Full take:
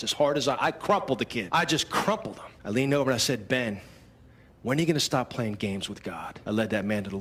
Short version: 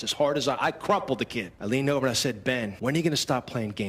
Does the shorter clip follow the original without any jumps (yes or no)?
no